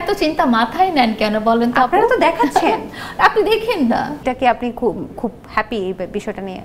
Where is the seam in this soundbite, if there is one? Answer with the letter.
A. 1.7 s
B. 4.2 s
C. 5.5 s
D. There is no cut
B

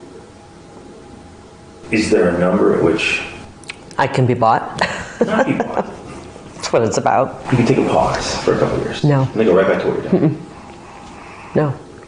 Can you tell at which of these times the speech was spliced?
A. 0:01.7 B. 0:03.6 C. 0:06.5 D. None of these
D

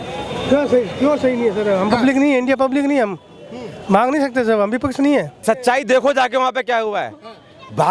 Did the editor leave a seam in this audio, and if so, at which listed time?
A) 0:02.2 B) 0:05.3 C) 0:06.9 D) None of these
B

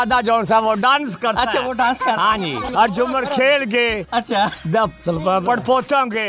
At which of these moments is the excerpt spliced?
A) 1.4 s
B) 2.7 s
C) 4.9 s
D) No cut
B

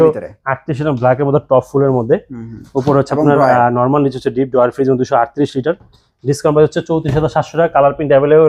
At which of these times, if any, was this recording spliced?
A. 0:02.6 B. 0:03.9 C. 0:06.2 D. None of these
D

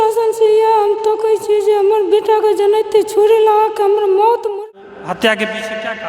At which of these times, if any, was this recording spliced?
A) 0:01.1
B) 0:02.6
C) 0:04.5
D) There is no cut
C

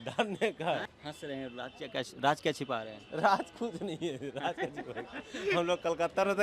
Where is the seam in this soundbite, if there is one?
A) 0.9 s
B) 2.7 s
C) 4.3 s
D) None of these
A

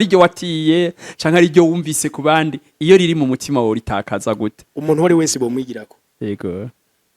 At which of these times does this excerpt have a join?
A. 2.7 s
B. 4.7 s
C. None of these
B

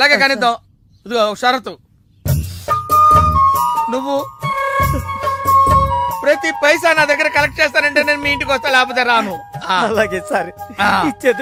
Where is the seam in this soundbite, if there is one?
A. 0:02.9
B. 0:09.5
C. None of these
C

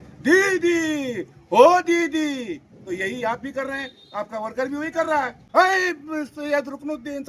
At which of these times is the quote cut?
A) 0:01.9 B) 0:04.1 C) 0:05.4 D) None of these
C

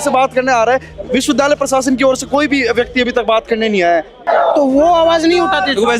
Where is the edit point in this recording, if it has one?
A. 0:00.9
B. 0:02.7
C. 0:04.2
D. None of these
C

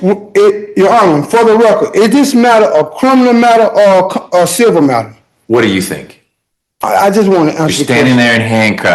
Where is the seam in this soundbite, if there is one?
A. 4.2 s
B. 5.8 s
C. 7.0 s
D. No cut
D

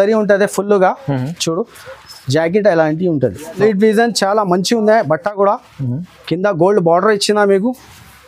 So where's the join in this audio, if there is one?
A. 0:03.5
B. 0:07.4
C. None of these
A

